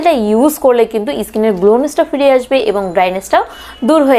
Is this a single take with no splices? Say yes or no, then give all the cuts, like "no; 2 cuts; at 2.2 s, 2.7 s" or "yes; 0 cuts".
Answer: yes; 0 cuts